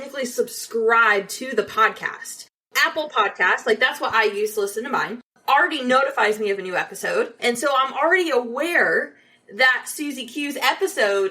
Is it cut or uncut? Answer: cut